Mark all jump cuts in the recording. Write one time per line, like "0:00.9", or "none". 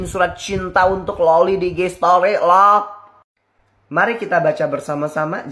none